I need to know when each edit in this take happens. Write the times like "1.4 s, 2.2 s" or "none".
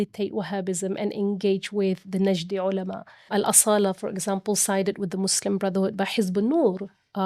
3.3 s